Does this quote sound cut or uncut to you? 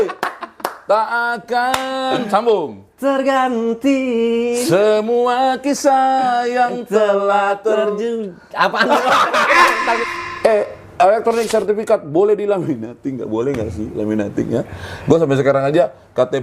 cut